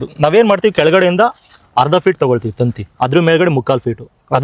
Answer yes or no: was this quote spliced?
yes